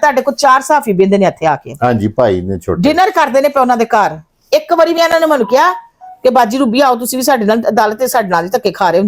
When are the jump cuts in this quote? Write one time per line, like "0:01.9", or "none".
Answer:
none